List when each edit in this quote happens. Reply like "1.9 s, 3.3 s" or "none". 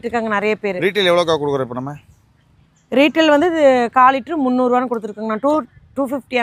none